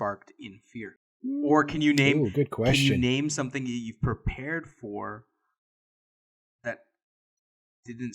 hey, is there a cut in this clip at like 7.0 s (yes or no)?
no